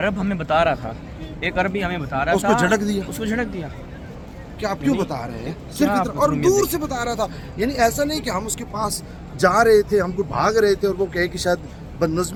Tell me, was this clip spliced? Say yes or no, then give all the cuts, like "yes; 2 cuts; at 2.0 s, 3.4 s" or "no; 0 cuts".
no; 0 cuts